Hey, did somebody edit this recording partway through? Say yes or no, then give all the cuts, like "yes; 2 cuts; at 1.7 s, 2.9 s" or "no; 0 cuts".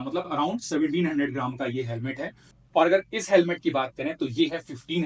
no; 0 cuts